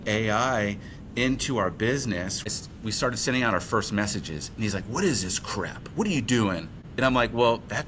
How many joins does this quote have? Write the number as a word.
one